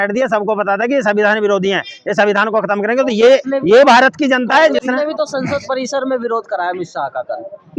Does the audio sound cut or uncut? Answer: uncut